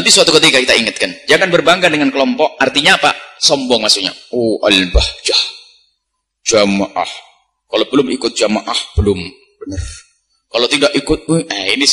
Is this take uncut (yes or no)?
yes